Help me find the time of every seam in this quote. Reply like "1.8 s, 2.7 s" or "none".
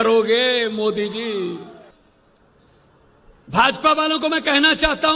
1.8 s